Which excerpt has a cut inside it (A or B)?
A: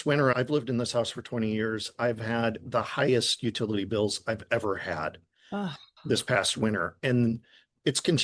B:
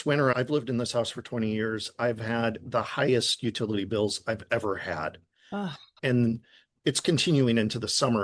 B